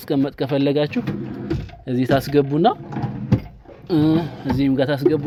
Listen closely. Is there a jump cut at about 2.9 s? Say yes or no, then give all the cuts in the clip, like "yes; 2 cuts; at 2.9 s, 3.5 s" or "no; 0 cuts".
no; 0 cuts